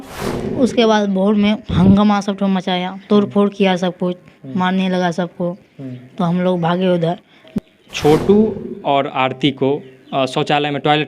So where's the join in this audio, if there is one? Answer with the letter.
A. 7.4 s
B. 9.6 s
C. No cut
A